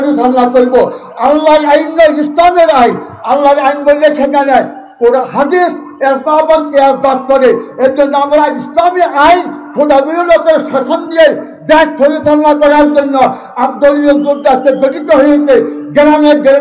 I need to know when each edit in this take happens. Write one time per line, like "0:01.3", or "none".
none